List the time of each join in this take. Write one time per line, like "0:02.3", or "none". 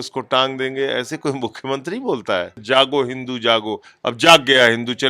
0:02.6